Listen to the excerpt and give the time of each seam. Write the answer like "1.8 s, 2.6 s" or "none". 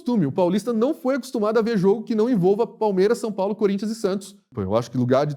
4.4 s